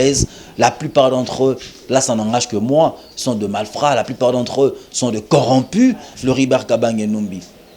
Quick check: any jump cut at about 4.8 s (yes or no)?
no